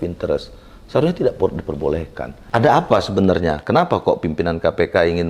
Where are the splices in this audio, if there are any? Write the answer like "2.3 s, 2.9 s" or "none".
2.3 s